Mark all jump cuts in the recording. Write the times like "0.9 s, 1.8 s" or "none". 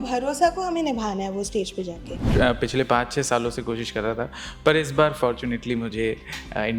2.1 s